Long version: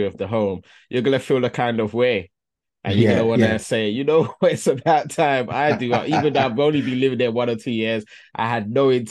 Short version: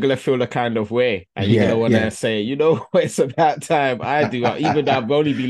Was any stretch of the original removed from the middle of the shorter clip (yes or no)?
yes